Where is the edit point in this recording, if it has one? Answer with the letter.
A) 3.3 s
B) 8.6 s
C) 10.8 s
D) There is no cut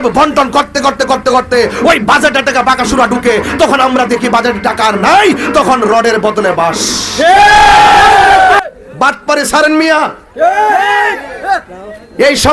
B